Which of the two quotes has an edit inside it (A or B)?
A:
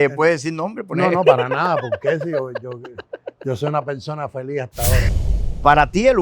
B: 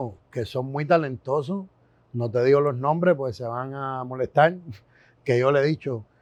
A